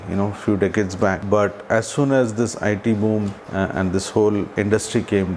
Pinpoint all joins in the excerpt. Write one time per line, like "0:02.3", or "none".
0:01.2
0:03.4
0:04.5